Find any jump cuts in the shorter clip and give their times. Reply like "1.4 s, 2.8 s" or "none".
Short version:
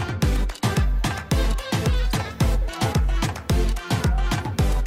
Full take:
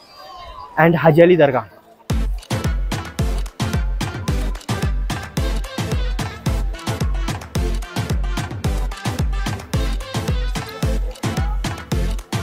none